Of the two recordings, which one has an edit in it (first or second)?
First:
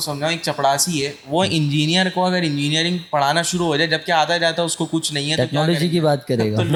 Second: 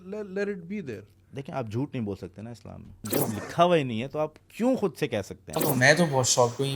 second